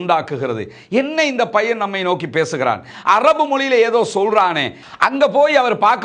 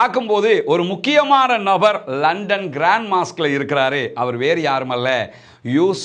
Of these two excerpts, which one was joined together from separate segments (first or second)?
first